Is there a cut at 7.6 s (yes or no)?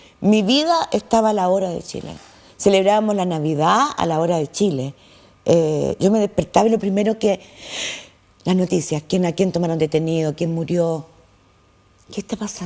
yes